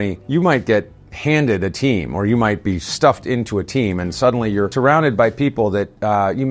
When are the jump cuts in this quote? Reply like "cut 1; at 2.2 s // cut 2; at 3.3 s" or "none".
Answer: none